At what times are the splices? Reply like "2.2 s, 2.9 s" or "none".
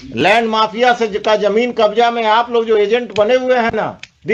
none